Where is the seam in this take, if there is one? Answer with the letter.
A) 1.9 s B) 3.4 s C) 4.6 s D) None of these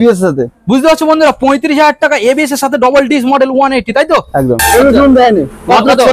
C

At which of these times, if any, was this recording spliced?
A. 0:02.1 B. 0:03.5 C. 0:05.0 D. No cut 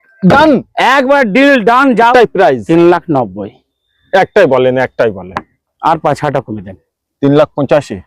A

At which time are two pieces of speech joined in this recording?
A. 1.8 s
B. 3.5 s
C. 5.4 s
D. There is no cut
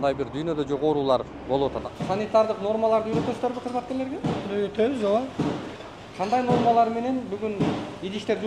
A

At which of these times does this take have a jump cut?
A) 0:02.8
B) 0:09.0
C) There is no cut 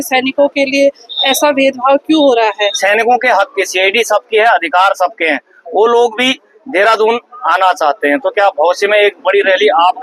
A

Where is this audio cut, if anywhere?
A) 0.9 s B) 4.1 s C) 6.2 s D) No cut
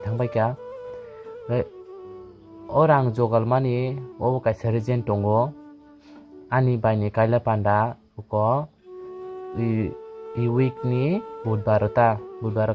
D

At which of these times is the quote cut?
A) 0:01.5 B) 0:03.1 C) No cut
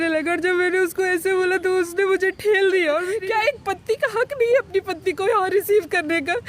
B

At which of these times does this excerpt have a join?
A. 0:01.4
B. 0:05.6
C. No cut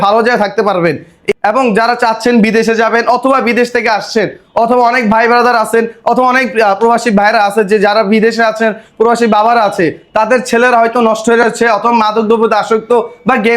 A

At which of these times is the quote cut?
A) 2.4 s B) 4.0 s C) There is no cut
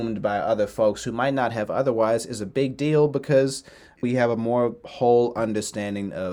B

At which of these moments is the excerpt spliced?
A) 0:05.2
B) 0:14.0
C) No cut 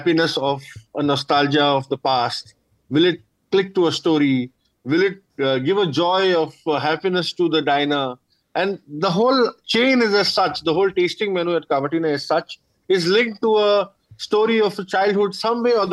A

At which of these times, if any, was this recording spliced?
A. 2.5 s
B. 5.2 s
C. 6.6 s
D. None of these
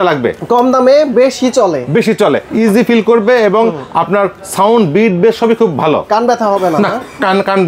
A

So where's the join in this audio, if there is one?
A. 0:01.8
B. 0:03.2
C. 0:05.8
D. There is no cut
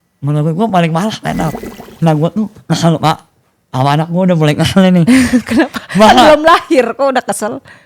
A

